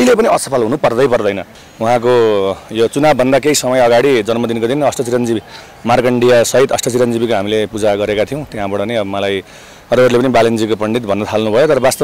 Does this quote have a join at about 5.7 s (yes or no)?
no